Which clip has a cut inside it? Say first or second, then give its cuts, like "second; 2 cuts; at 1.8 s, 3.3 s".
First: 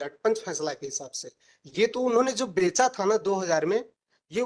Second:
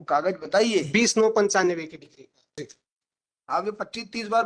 second; 1 cut; at 2.4 s